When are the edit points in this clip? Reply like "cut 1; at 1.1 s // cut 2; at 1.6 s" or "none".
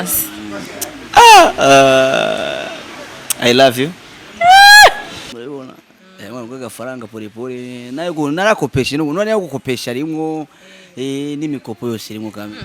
cut 1; at 5.3 s

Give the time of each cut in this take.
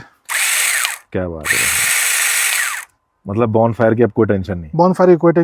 none

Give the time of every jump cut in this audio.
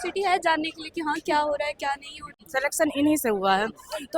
cut 1; at 2.3 s

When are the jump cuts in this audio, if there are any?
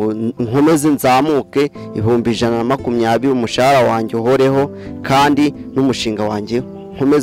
none

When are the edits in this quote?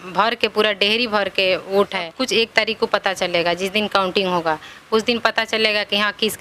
cut 1; at 2.1 s

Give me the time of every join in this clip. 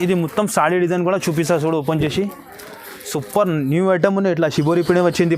none

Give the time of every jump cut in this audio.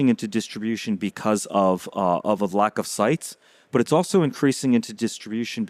none

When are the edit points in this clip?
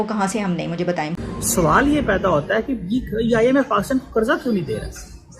cut 1; at 1.1 s

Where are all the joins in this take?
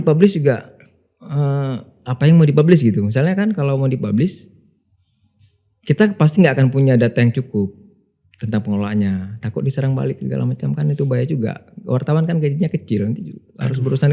none

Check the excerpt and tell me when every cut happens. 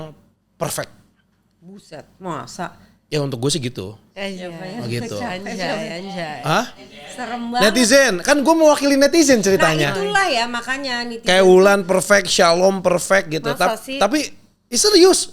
none

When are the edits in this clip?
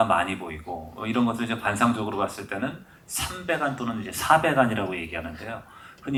none

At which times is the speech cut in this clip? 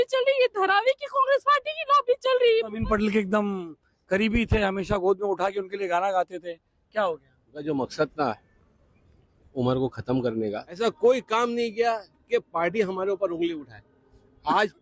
cut 1; at 2.8 s // cut 2; at 7.6 s // cut 3; at 10.8 s

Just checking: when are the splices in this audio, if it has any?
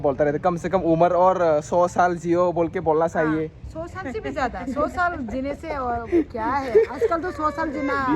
none

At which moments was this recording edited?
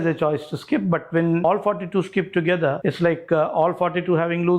cut 1; at 1.4 s // cut 2; at 2.8 s

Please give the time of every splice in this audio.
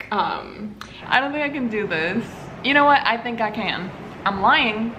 cut 1; at 1.0 s // cut 2; at 4.0 s

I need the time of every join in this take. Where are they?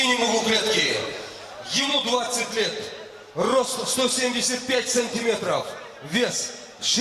none

